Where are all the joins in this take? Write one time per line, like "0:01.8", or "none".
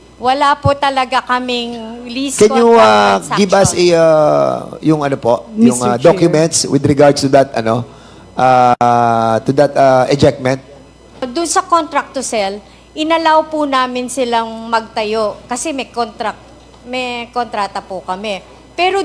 0:11.3